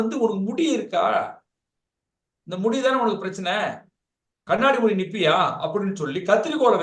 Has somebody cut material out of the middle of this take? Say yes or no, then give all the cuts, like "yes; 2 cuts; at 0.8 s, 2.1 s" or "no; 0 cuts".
no; 0 cuts